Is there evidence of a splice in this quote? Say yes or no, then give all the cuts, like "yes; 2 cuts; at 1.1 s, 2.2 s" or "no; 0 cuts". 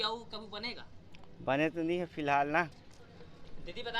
yes; 1 cut; at 2.8 s